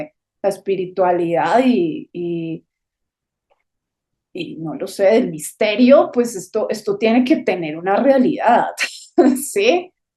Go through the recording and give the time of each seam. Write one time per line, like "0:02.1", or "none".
none